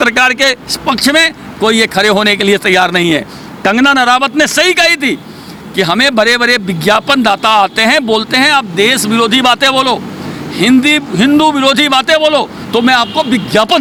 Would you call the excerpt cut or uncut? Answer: uncut